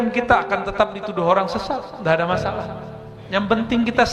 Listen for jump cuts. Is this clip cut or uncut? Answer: uncut